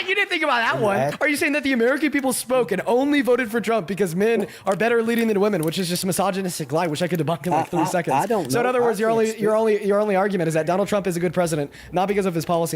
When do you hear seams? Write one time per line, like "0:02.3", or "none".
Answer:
0:01.1